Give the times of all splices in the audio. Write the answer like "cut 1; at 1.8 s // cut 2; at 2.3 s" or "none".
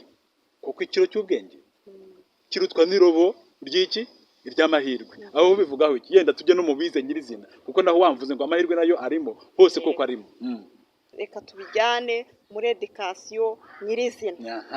cut 1; at 11.1 s